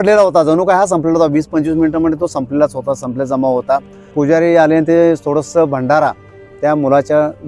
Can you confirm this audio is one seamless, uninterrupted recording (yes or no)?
no